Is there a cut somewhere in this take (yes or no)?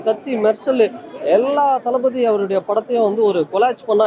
no